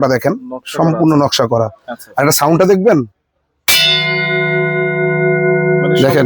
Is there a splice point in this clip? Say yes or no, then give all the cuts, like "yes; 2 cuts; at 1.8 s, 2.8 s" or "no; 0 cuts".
no; 0 cuts